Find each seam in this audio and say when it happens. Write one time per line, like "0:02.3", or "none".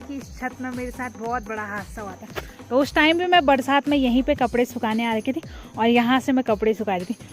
none